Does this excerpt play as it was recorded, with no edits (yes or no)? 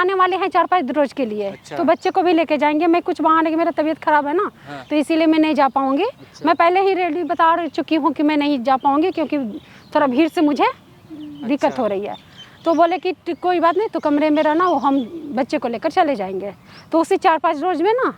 yes